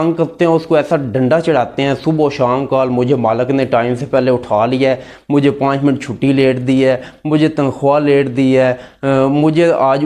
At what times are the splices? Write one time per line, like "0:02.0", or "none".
none